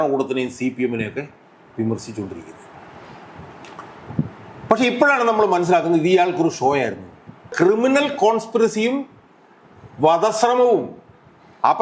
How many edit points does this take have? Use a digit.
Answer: 1